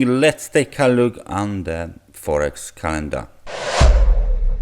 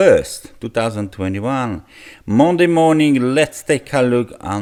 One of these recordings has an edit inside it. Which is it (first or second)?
first